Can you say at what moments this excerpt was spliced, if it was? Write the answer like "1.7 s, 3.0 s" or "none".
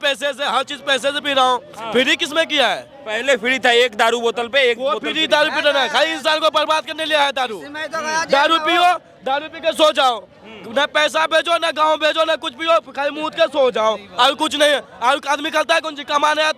none